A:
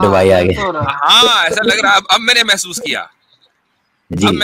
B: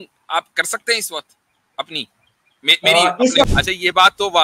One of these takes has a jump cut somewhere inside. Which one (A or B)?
B